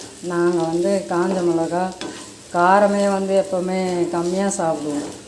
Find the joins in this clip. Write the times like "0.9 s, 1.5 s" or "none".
none